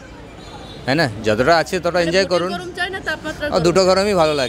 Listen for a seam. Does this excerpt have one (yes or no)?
no